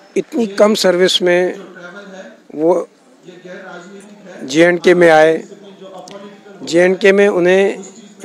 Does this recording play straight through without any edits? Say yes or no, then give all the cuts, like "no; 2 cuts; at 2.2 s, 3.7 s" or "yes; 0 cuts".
yes; 0 cuts